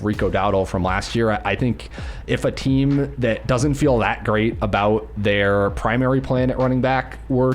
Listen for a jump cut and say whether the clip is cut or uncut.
uncut